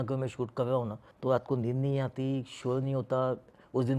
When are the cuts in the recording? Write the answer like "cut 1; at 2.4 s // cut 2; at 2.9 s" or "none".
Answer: cut 1; at 1.0 s